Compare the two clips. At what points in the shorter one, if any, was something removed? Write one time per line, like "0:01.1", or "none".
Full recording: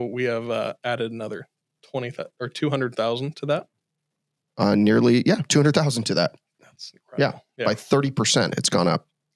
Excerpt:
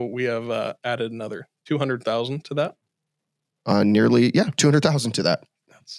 0:01.5